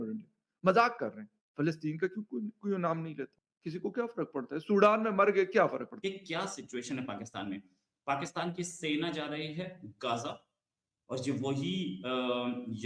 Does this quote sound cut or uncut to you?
cut